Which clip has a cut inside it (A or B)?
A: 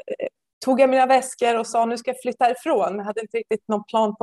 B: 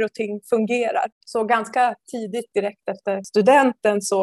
B